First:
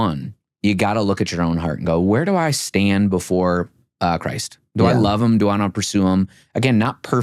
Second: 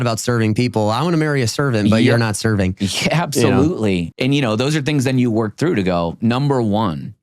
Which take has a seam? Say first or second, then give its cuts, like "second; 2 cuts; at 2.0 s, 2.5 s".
second; 1 cut; at 4.0 s